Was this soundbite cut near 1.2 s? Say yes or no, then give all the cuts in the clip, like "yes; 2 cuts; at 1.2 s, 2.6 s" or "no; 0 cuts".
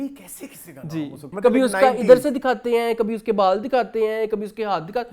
yes; 1 cut; at 1.2 s